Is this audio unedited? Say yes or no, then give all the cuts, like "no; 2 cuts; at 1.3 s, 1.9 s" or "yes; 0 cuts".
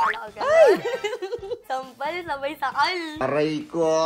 no; 1 cut; at 1.6 s